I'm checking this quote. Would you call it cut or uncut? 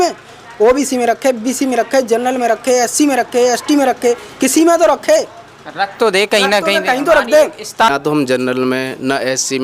cut